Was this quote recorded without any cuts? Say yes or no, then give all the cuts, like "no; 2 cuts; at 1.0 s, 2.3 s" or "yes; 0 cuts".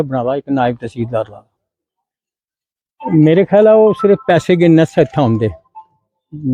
yes; 0 cuts